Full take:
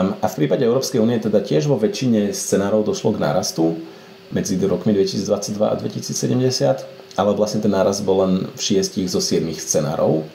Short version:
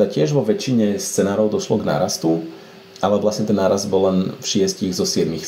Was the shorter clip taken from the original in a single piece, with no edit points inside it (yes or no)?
no